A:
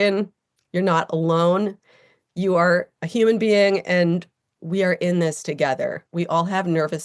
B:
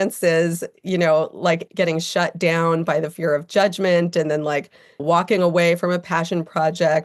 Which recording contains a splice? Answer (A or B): B